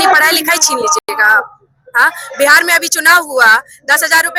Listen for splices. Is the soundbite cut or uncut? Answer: uncut